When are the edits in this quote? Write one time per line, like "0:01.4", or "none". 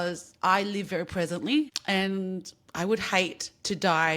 0:01.8